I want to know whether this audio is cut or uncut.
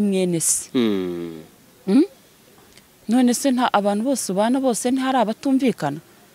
uncut